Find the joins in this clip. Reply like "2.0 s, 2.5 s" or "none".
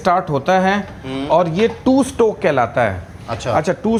none